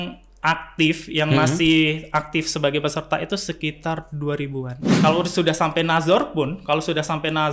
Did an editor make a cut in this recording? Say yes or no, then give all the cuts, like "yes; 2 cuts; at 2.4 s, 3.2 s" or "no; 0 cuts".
yes; 1 cut; at 4.8 s